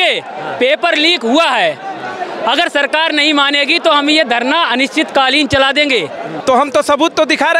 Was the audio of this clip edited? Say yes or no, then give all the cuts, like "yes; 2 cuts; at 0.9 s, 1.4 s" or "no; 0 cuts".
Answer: yes; 1 cut; at 6.3 s